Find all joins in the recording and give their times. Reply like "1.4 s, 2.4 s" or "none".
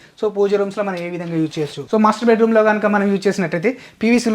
1.8 s